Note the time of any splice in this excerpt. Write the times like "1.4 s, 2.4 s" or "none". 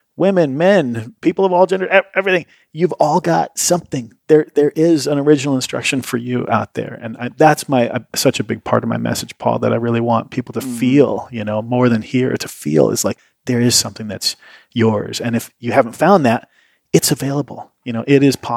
13.3 s